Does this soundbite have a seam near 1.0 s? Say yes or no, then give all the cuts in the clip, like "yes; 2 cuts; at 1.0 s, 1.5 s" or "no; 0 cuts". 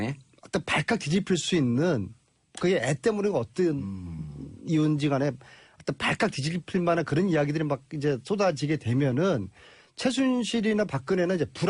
no; 1 cut; at 4.4 s